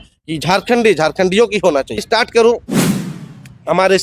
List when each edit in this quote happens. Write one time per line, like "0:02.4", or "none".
0:02.0